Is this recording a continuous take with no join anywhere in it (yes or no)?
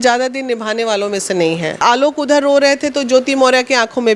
no